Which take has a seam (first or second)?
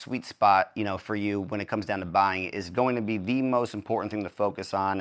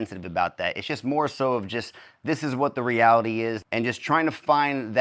second